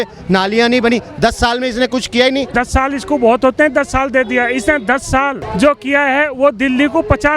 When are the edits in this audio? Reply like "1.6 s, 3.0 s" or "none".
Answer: 2.5 s, 5.4 s